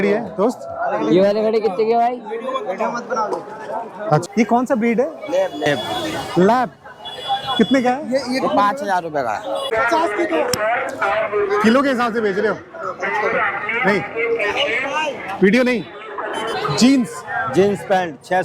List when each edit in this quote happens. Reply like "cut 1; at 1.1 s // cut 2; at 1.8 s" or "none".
cut 1; at 4.2 s // cut 2; at 9.7 s // cut 3; at 16.5 s

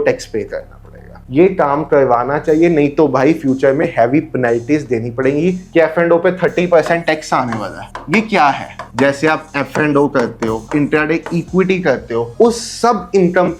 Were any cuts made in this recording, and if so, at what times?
cut 1; at 1.2 s // cut 2; at 5.7 s // cut 3; at 8.8 s // cut 4; at 10.7 s // cut 5; at 12.3 s

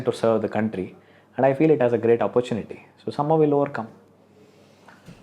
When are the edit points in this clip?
none

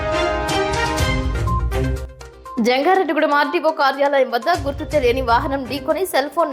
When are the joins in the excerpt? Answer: cut 1; at 2.5 s

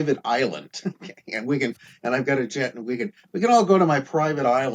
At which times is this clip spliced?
none

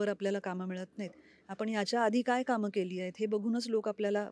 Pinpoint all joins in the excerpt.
none

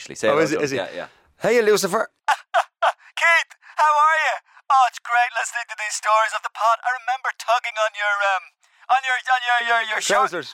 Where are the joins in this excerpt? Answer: cut 1; at 2.2 s

